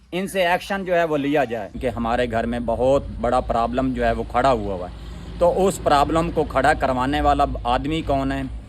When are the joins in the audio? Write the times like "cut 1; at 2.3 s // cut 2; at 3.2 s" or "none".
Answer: cut 1; at 1.7 s